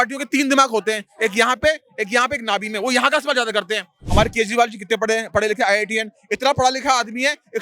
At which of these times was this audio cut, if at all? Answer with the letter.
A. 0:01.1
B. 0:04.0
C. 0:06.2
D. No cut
B